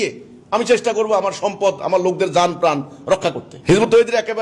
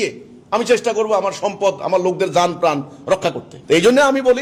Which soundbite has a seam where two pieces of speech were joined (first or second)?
first